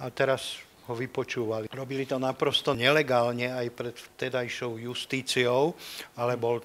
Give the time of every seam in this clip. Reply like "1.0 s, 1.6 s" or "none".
1.7 s, 2.8 s

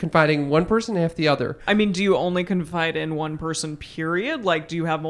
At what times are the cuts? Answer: 1.6 s

